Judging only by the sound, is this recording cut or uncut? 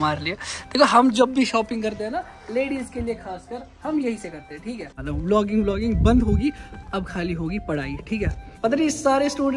cut